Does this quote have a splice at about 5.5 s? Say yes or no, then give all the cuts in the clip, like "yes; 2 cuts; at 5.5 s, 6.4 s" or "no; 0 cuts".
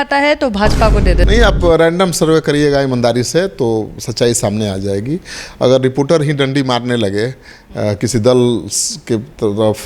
no; 1 cut; at 1.2 s